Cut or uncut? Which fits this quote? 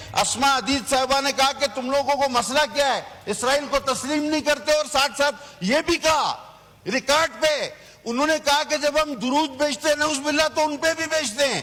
uncut